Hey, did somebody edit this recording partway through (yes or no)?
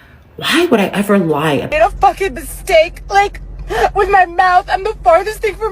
yes